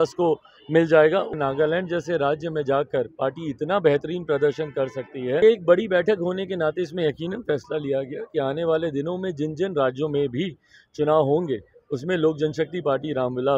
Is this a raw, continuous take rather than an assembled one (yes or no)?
no